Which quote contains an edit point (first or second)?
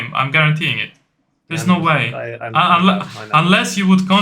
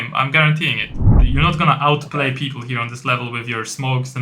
second